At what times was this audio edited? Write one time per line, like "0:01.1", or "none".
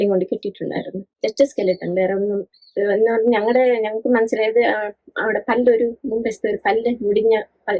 0:01.0